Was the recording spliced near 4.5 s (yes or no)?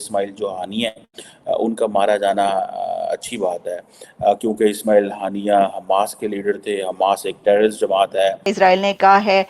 no